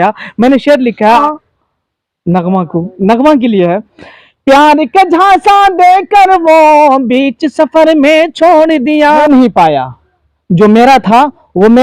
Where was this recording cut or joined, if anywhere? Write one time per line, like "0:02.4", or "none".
0:01.2
0:09.2